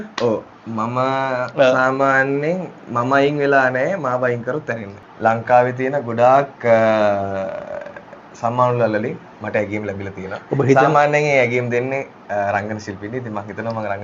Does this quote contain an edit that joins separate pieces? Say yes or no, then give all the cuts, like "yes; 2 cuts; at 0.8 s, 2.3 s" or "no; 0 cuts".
yes; 1 cut; at 4.9 s